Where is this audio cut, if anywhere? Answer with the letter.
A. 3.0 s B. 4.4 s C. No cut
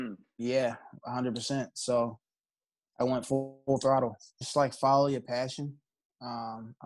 B